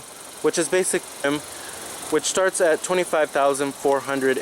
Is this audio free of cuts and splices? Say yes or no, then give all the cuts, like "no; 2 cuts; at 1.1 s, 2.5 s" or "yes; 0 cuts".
no; 1 cut; at 1.2 s